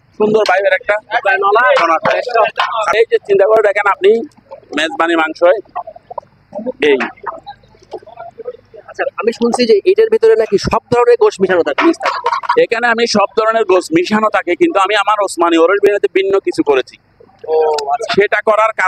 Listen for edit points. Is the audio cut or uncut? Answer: cut